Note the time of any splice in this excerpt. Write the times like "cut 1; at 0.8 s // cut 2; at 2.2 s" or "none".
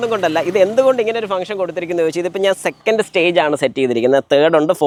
none